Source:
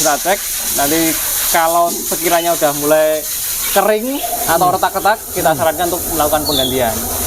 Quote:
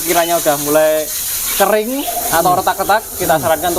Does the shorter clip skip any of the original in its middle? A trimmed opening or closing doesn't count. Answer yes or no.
no